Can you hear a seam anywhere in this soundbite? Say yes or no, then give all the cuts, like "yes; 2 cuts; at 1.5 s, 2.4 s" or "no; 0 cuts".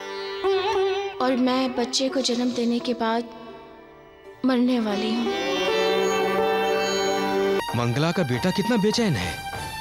yes; 1 cut; at 7.6 s